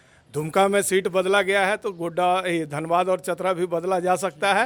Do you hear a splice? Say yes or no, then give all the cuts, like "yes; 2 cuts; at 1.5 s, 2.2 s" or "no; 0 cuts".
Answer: no; 0 cuts